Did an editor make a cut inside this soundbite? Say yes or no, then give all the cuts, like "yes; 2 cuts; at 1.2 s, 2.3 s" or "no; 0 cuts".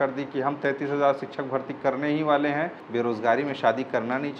yes; 1 cut; at 2.8 s